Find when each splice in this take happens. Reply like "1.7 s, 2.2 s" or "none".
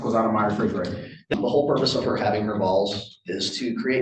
1.3 s